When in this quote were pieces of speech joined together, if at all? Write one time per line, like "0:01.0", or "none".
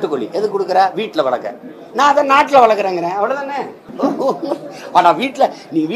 0:03.8